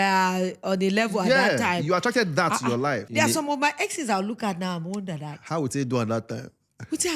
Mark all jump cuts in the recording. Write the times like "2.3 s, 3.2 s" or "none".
3.0 s